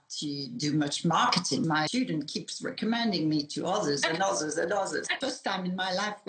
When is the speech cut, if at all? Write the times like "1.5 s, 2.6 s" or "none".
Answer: 1.7 s, 5.1 s